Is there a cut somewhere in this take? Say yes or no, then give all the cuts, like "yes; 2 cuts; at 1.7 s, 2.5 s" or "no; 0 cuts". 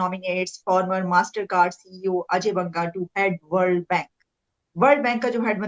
no; 0 cuts